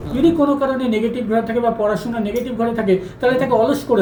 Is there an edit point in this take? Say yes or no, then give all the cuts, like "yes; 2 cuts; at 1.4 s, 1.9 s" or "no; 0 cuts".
no; 0 cuts